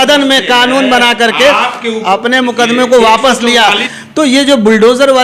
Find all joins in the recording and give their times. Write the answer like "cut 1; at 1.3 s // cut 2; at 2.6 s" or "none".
cut 1; at 3.9 s